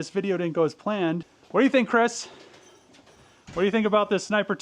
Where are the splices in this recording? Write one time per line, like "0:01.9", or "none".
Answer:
0:01.2

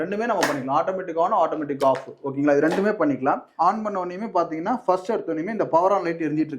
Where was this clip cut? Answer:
0:03.5

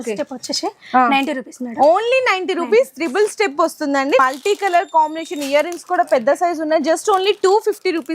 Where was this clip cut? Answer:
0:04.2

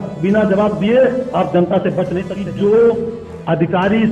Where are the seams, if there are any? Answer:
0:02.3

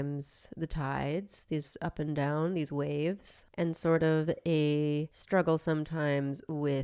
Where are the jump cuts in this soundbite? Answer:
none

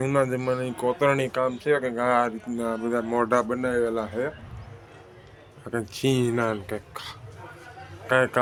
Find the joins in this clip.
none

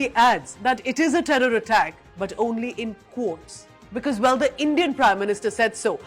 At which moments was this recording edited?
0:02.0

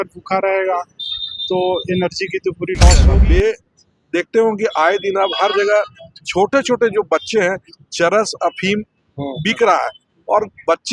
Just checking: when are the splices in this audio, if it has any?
0:03.1

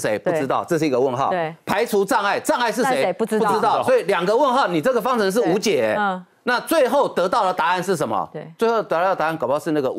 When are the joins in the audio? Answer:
none

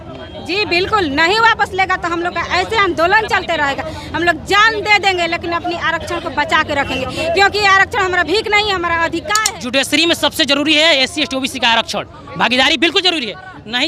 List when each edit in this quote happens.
0:09.4

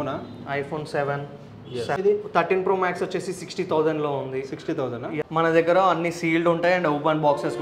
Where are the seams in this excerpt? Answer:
0:02.0

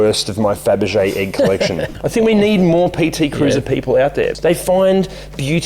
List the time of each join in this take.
0:01.9
0:04.3

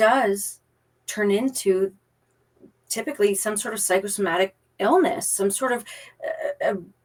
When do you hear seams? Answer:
none

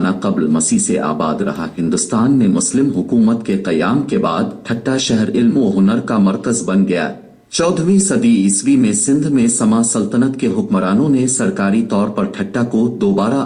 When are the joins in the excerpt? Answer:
none

